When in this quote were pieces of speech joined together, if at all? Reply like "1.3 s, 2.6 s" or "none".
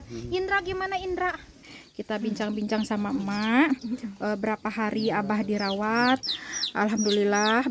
1.7 s, 6.2 s